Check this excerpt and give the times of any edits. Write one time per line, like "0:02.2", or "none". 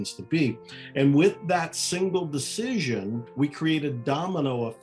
0:03.3